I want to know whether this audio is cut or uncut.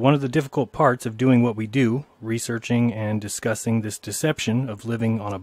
cut